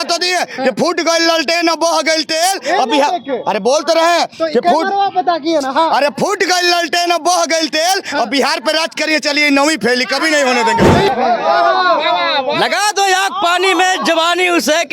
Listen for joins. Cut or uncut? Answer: cut